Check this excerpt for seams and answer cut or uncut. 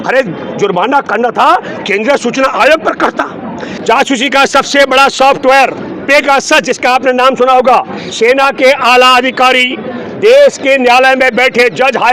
cut